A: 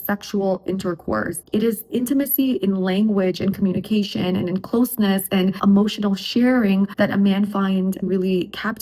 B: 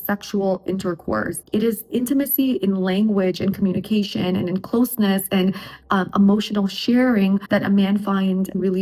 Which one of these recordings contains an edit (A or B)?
A